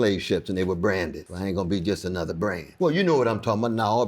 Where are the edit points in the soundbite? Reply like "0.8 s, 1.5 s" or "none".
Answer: 1.2 s, 2.7 s